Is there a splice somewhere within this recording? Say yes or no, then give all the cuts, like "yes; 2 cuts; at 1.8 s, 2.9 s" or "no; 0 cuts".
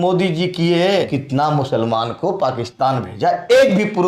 yes; 1 cut; at 1.1 s